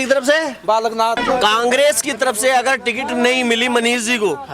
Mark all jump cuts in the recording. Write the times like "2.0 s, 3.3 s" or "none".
1.2 s